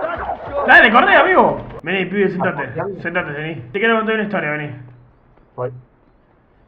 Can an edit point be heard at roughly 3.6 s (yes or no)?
yes